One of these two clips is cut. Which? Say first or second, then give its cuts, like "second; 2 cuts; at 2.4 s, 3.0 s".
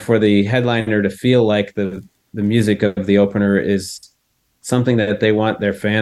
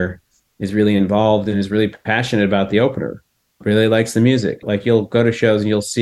second; 2 cuts; at 3.6 s, 4.6 s